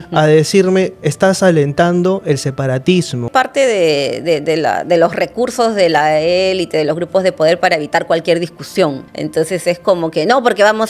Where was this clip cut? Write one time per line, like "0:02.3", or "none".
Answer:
0:03.3
0:09.0